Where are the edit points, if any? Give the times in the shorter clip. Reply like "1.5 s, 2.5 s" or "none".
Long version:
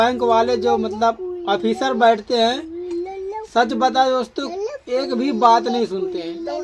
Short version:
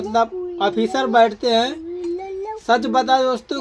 none